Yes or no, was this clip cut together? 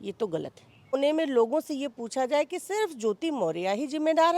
yes